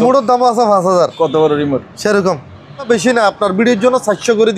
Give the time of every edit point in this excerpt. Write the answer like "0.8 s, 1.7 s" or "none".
2.8 s

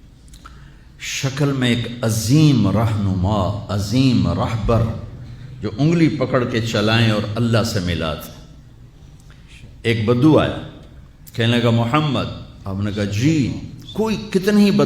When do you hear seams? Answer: 11.7 s

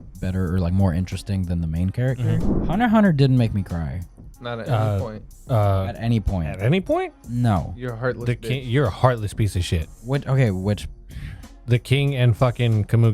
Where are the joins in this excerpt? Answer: 2.5 s

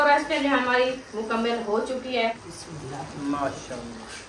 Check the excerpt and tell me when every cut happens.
2.5 s

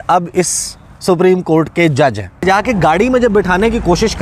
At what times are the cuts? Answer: 2.4 s

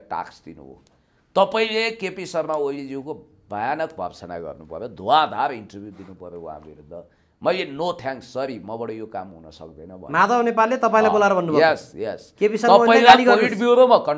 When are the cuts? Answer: none

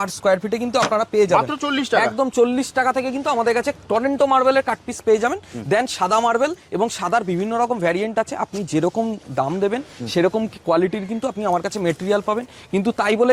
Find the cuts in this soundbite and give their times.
none

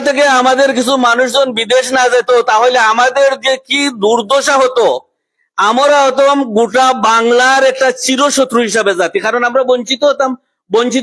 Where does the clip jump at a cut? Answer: none

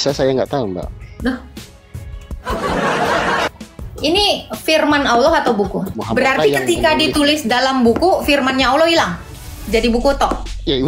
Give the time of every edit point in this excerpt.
3.5 s, 5.9 s

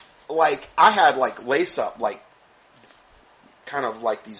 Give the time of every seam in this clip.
none

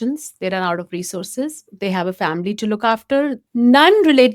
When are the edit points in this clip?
3.4 s

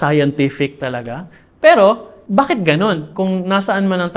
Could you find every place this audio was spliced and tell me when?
2.1 s, 3.1 s

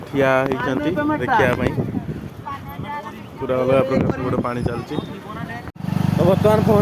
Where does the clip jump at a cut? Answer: 5.7 s

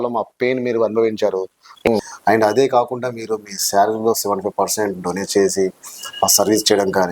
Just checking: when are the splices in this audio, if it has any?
1.7 s

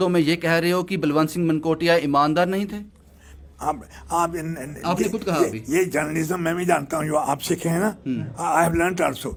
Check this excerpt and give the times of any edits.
none

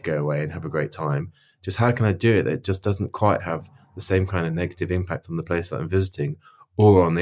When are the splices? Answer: none

